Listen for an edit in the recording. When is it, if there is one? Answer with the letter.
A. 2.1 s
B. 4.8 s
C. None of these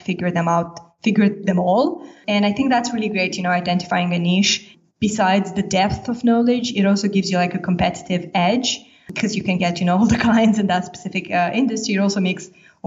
A